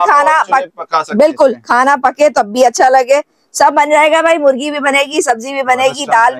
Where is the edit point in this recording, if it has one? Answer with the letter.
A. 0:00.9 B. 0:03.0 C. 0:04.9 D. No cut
D